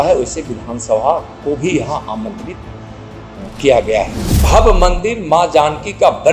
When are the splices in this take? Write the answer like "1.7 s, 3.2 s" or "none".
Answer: 4.4 s